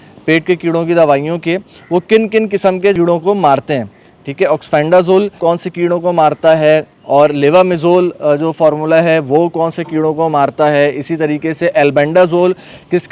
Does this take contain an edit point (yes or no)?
no